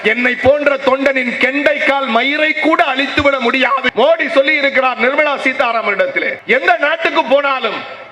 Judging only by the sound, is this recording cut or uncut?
cut